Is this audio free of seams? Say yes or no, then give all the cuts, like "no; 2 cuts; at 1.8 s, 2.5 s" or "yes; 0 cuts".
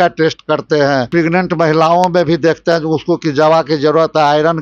no; 1 cut; at 1.1 s